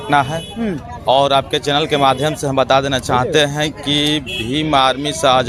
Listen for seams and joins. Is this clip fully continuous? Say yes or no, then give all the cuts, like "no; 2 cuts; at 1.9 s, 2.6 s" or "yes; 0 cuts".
yes; 0 cuts